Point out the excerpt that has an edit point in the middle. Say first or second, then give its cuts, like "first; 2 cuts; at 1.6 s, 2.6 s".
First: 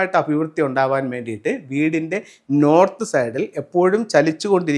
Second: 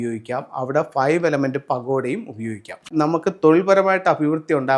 second; 1 cut; at 2.9 s